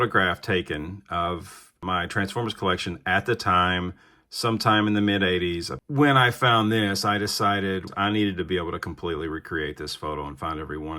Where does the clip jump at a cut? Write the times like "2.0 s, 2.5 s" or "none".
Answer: 5.8 s, 7.9 s